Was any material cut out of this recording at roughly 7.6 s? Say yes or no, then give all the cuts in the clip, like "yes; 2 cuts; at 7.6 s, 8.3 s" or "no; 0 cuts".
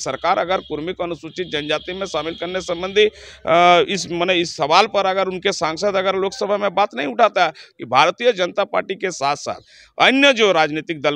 yes; 1 cut; at 7.6 s